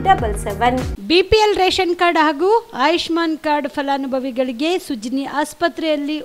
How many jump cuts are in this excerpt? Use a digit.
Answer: 1